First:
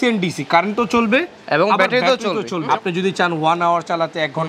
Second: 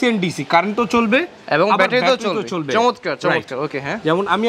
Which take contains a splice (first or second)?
first